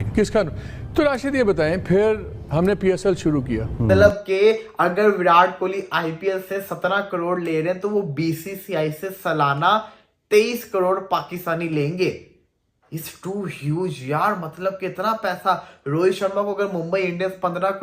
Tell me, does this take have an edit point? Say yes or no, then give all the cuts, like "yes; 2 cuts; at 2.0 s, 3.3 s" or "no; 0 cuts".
yes; 1 cut; at 3.9 s